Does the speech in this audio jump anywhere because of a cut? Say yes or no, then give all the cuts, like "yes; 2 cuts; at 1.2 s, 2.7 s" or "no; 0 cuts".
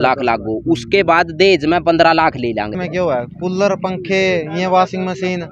yes; 1 cut; at 2.8 s